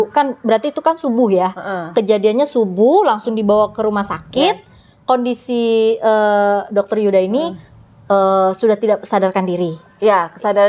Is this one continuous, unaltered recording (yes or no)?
yes